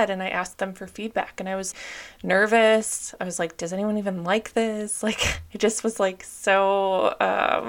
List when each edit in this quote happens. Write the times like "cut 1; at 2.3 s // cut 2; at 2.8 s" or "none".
none

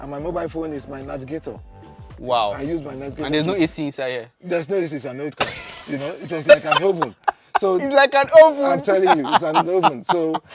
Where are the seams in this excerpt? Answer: none

